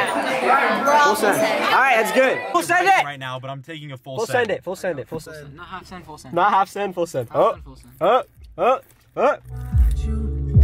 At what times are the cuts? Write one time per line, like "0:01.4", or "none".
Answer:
0:02.4
0:05.2